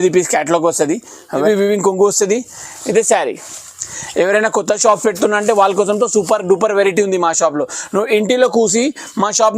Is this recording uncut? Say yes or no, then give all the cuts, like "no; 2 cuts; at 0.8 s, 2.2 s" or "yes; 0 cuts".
no; 1 cut; at 1.4 s